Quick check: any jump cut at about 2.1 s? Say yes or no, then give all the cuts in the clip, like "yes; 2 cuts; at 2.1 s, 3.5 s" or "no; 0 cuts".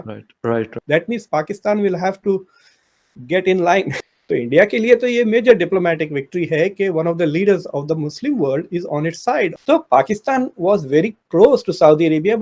no; 3 cuts; at 0.8 s, 4.0 s, 9.6 s